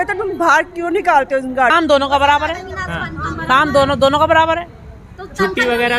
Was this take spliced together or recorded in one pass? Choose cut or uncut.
cut